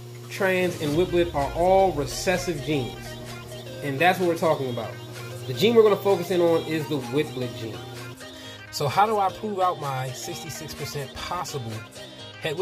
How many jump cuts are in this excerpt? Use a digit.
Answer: 2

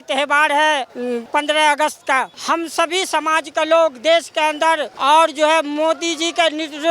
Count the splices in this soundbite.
3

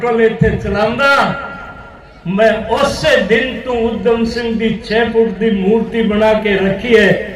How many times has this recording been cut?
0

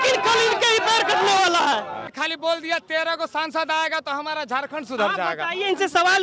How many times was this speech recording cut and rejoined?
1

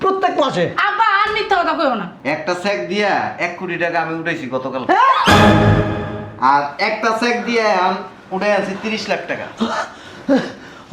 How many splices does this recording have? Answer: 1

